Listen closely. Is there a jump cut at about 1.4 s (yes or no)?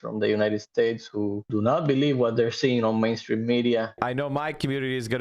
yes